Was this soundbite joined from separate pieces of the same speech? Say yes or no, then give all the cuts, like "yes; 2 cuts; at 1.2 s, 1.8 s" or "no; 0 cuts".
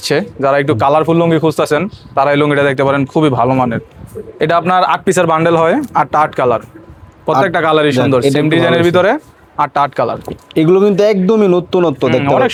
no; 0 cuts